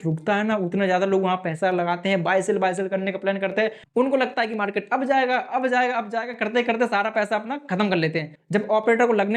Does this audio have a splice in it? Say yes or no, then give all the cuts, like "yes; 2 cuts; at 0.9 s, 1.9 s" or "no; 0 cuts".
yes; 2 cuts; at 3.8 s, 8.3 s